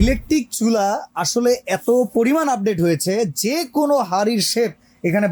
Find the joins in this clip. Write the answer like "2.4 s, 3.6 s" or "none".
none

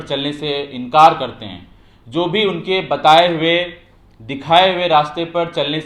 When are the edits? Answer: none

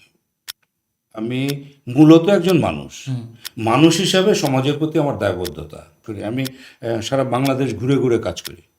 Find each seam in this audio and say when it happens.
6.1 s

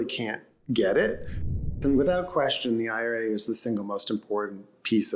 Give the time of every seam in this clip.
1.6 s

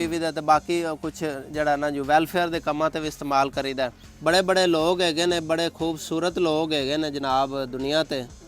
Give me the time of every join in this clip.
4.0 s

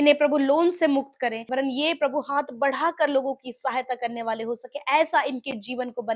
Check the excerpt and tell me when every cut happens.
1.5 s

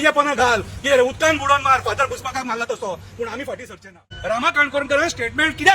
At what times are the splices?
4.1 s

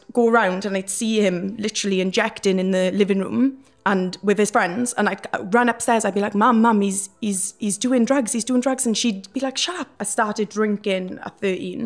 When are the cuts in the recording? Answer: 10.0 s

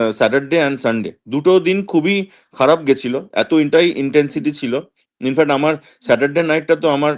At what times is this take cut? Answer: none

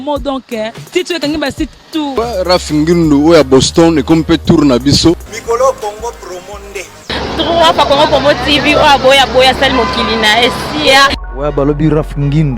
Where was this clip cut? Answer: 2.1 s, 5.3 s, 11.2 s

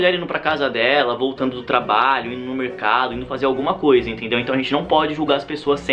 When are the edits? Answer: none

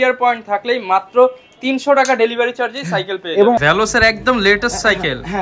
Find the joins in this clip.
3.6 s

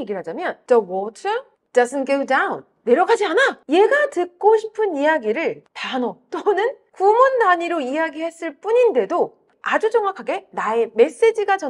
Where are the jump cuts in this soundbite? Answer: 3.6 s, 9.4 s

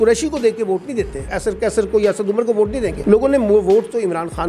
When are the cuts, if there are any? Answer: 1.3 s, 3.0 s

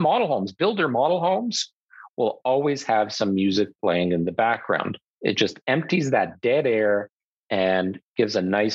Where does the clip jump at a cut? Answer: 5.0 s

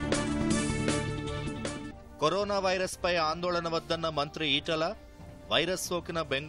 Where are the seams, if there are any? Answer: 2.0 s

